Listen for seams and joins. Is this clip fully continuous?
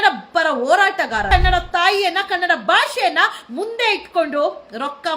no; 1 cut; at 1.3 s

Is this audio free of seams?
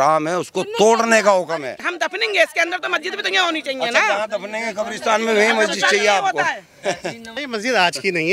no; 2 cuts; at 1.9 s, 7.4 s

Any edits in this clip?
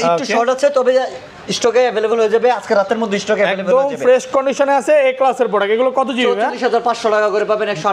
no; 0 cuts

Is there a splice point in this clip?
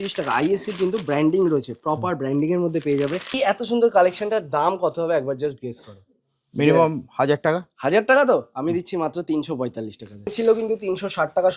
yes; 2 cuts; at 3.4 s, 10.3 s

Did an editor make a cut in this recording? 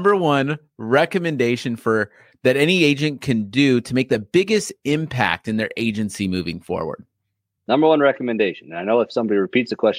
no; 0 cuts

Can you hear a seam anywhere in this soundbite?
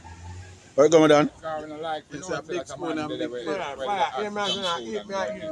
no; 0 cuts

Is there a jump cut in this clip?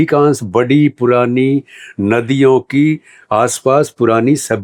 no; 0 cuts

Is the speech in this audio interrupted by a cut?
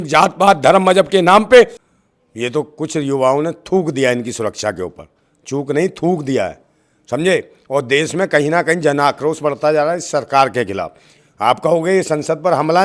yes; 1 cut; at 1.8 s

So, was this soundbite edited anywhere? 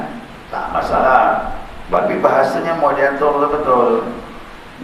yes; 1 cut; at 2.0 s

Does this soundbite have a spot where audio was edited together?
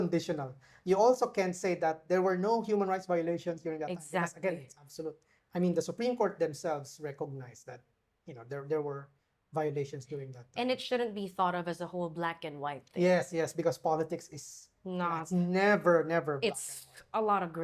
no; 0 cuts

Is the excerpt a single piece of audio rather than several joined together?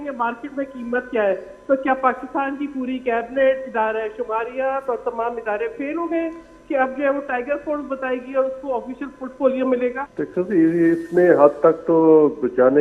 no; 1 cut; at 10.0 s

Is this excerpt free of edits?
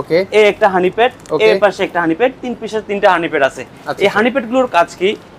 yes; 0 cuts

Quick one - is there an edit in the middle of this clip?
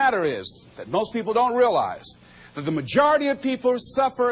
no; 0 cuts

